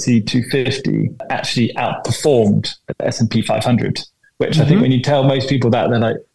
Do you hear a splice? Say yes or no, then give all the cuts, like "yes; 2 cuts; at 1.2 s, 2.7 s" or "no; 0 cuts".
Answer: yes; 1 cut; at 1.3 s